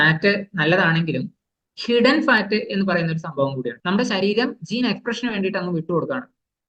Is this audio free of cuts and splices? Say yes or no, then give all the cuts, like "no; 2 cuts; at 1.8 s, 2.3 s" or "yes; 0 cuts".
no; 1 cut; at 3.7 s